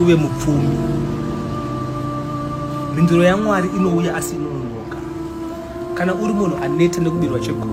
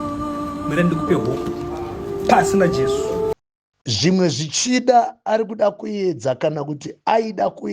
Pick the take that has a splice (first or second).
second